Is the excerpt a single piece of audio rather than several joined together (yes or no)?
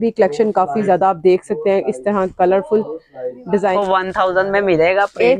no